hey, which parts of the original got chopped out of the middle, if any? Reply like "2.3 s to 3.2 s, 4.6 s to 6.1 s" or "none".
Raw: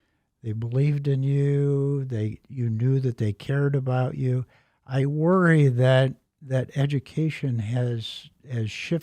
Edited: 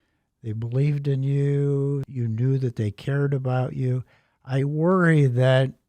2.1 s to 2.5 s

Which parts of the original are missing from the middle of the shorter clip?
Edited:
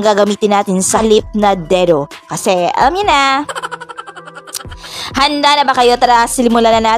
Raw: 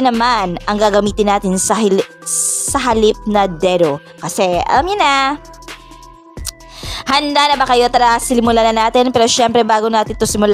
1.8 s to 2.9 s

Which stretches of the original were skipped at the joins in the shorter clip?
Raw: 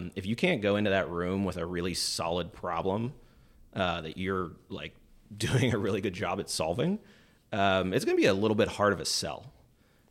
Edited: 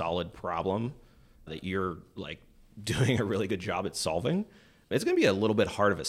3.7 s to 4.0 s, 7.4 s to 7.9 s

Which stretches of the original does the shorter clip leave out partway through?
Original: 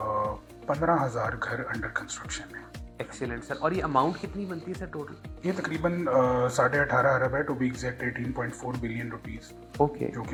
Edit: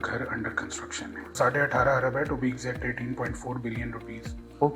2.7 s to 6.5 s

